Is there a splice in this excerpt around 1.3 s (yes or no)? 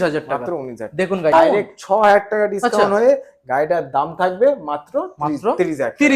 yes